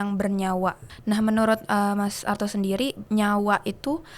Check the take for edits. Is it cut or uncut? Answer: cut